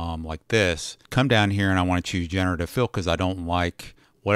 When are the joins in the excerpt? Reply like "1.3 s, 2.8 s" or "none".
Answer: 0.9 s